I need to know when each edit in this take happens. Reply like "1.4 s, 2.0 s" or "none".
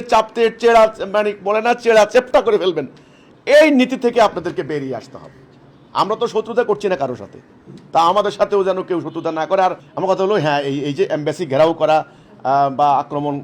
9.9 s